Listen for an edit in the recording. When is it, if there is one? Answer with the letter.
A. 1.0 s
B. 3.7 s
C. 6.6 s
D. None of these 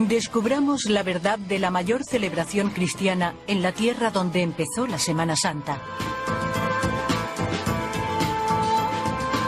C